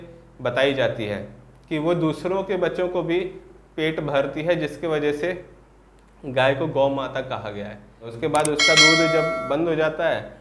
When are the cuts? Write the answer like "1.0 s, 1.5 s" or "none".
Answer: 8.1 s

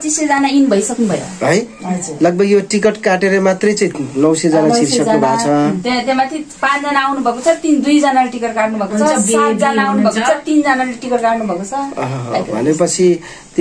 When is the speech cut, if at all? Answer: none

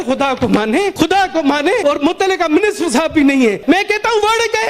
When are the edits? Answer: 0.9 s, 1.8 s, 3.6 s

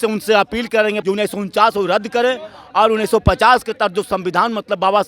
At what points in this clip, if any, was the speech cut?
1.0 s

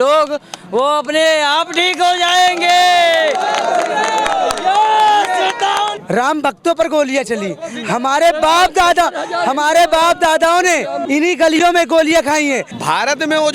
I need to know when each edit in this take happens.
6.0 s, 12.7 s

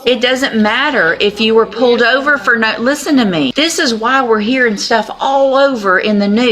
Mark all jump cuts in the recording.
3.5 s

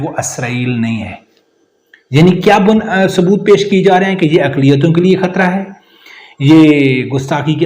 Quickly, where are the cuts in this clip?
none

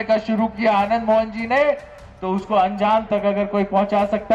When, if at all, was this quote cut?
none

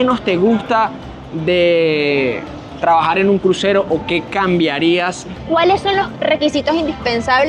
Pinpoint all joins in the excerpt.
5.4 s

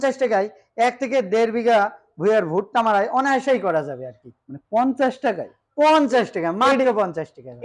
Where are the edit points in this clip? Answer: none

